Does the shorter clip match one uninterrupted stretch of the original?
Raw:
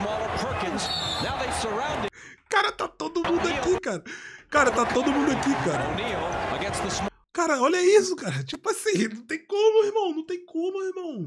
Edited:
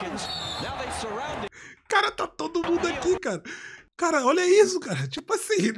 no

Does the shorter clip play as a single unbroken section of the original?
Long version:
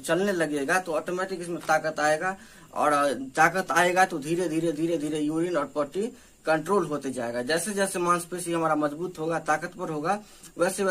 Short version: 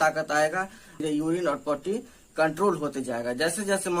no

